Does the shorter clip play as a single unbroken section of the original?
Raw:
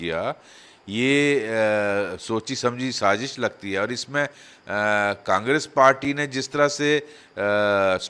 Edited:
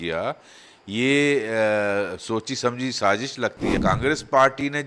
no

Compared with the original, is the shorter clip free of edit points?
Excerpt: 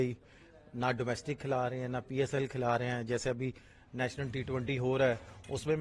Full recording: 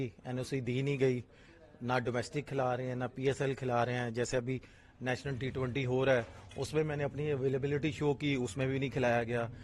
yes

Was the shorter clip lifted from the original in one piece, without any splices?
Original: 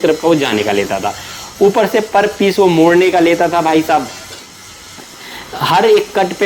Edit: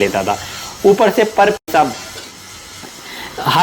no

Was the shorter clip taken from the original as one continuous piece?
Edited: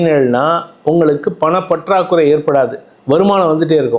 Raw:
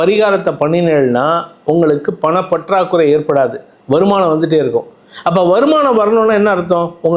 yes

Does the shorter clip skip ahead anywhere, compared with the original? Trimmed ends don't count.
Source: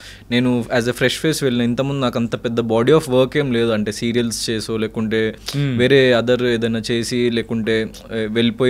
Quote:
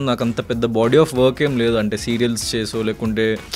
no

